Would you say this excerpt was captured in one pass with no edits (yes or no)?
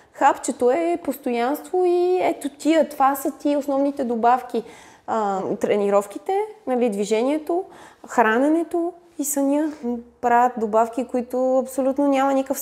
no